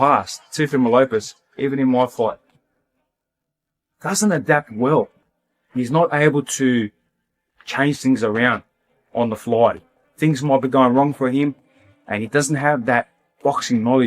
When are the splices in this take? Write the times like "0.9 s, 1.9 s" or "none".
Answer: 13.0 s